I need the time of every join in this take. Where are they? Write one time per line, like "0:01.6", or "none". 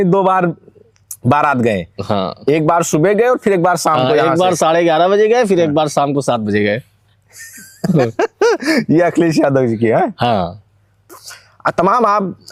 none